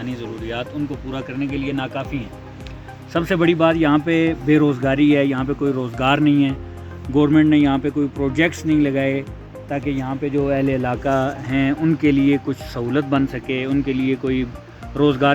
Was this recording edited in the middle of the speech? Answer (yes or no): no